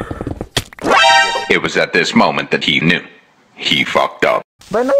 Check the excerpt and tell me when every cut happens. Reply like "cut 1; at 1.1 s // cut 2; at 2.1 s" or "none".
none